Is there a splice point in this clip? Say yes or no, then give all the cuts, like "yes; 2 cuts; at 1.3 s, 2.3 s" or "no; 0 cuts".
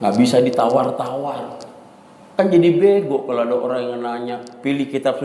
no; 0 cuts